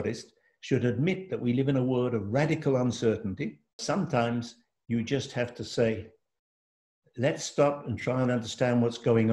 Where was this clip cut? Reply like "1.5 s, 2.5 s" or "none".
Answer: 3.8 s